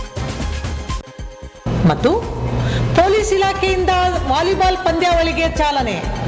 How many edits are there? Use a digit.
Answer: 1